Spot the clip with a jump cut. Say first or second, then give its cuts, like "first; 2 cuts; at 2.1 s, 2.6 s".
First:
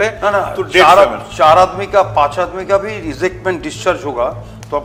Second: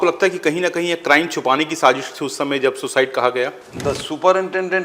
second; 1 cut; at 3.7 s